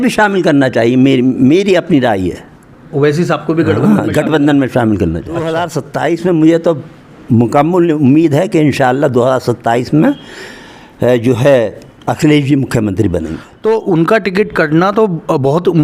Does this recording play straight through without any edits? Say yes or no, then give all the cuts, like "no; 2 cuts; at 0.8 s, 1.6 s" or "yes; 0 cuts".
no; 2 cuts; at 5.6 s, 13.4 s